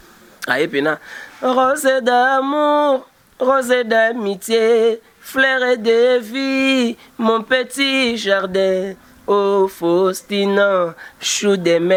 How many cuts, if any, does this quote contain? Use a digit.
0